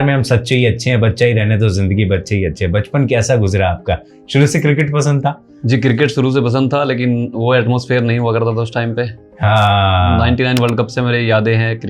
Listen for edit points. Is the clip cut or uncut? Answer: cut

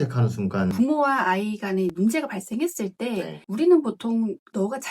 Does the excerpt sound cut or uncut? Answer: cut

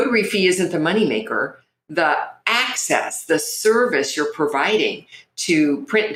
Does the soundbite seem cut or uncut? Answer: uncut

